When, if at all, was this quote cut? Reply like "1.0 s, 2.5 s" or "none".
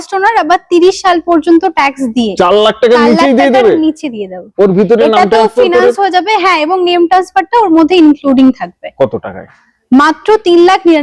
none